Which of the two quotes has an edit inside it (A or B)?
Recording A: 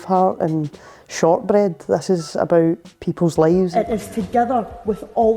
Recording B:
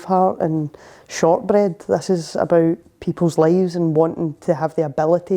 A